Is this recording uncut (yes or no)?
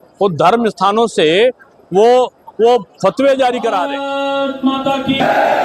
no